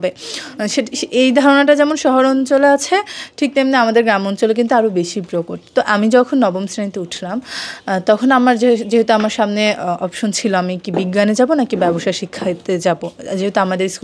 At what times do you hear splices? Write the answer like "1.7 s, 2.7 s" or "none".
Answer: none